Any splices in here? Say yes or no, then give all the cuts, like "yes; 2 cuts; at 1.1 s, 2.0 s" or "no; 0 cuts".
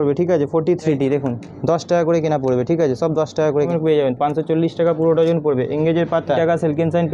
yes; 3 cuts; at 0.9 s, 3.7 s, 6.4 s